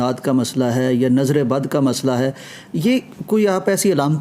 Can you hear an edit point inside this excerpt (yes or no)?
no